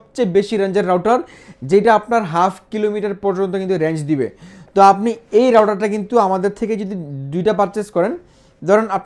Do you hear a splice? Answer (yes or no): no